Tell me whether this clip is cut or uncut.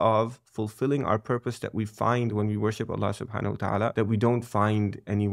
cut